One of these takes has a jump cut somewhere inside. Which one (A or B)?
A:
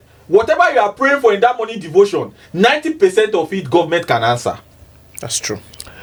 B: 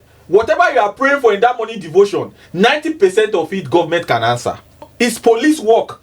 B